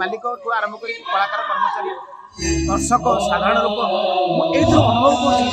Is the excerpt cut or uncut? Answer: uncut